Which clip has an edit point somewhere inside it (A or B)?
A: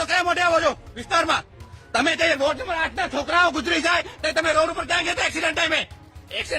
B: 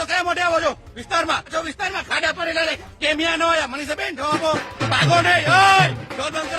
B